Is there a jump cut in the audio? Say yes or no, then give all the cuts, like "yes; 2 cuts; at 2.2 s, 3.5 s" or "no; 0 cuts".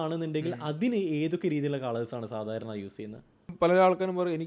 yes; 1 cut; at 3.5 s